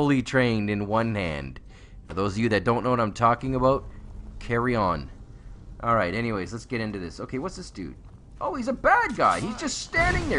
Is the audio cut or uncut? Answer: uncut